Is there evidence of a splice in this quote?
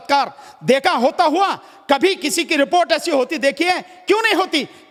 no; 0 cuts

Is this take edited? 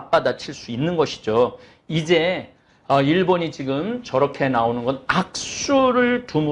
no; 0 cuts

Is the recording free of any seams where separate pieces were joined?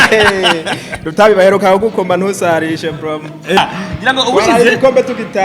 no; 1 cut; at 3.6 s

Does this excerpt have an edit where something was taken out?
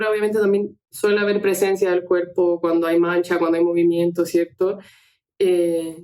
no; 0 cuts

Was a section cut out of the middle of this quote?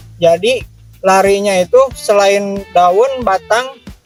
no; 0 cuts

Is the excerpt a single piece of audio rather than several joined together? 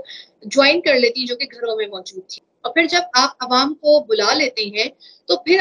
no; 1 cut; at 2.2 s

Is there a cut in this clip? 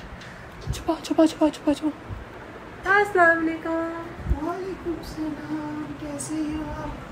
no; 0 cuts

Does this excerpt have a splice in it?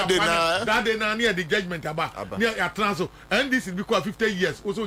no; 0 cuts

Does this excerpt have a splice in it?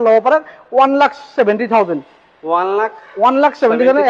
no; 0 cuts

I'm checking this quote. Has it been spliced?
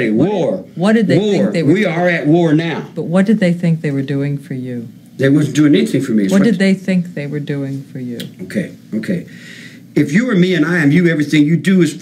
yes; 1 cut; at 8.1 s

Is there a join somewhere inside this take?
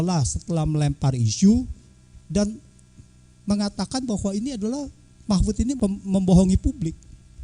yes; 1 cut; at 5.7 s

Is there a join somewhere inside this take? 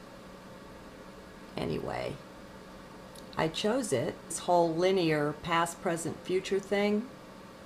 no; 0 cuts

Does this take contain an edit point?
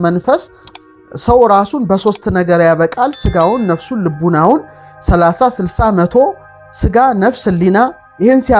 no; 0 cuts

